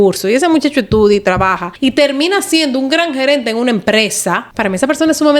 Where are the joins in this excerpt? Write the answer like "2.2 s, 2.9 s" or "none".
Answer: 1.6 s, 4.5 s